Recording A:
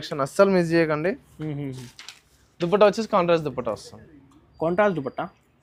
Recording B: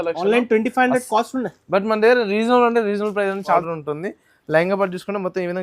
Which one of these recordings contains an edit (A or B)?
B